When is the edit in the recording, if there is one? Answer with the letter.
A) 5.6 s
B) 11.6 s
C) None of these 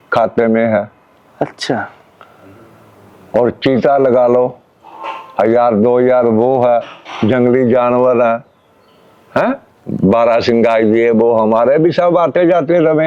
C